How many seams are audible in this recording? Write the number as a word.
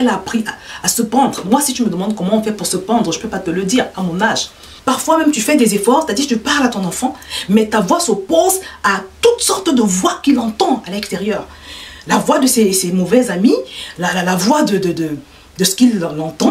one